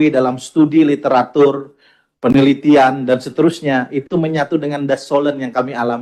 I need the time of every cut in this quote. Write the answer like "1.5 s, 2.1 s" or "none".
none